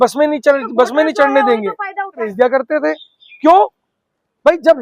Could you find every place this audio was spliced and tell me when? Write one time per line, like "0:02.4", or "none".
0:02.3